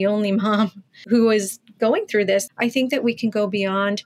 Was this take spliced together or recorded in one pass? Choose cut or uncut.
cut